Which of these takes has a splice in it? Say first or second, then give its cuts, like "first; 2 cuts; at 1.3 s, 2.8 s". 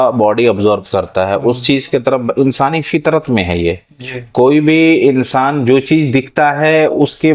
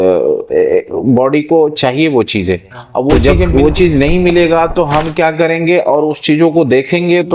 second; 1 cut; at 3.1 s